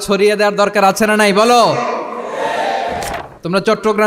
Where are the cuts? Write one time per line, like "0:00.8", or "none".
0:03.0